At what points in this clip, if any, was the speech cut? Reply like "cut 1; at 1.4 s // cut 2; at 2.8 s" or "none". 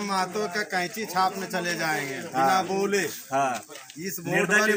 none